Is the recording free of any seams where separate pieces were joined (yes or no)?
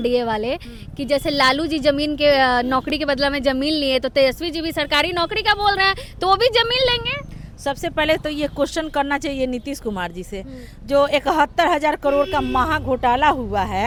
yes